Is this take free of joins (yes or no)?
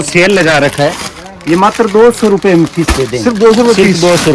yes